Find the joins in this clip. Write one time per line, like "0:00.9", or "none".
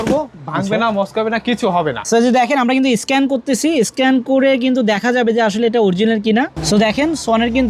0:02.0